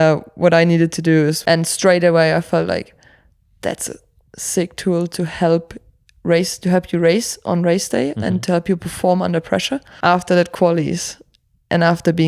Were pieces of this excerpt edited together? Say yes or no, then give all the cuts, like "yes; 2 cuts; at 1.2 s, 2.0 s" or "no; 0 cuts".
yes; 2 cuts; at 1.4 s, 9.8 s